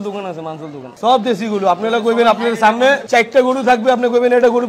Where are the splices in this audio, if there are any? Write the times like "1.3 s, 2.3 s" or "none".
0.9 s, 3.0 s